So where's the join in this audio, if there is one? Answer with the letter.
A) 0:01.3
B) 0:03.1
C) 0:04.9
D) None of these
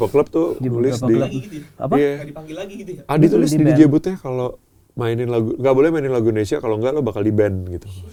D